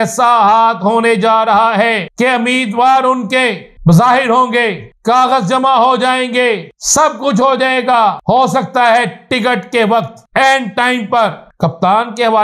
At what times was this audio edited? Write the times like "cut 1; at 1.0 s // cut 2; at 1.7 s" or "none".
cut 1; at 2.1 s // cut 2; at 3.7 s // cut 3; at 4.9 s // cut 4; at 6.8 s // cut 5; at 8.2 s // cut 6; at 10.2 s // cut 7; at 11.4 s